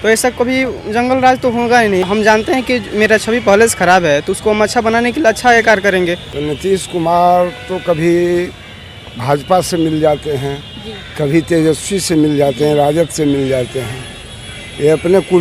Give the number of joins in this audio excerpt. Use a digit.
2